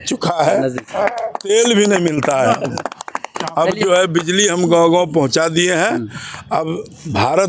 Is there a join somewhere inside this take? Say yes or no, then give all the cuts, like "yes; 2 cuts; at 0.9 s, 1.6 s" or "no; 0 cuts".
no; 0 cuts